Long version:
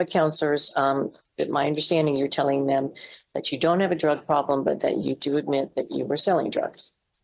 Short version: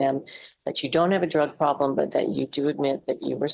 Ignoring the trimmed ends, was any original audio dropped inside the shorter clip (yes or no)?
no